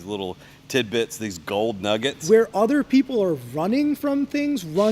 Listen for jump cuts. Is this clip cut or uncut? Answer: cut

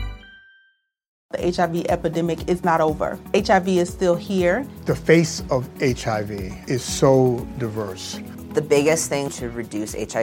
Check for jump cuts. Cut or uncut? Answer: cut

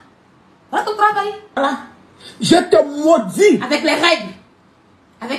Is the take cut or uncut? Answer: uncut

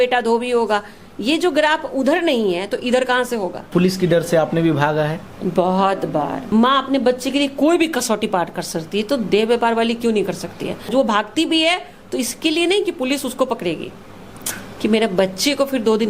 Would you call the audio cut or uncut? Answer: cut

